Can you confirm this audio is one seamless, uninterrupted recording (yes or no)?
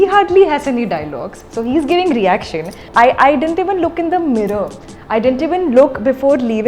no